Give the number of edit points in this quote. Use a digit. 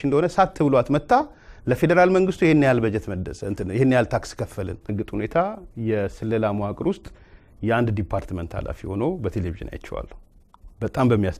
1